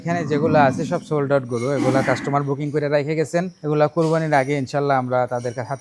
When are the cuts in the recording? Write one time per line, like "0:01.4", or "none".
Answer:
0:03.5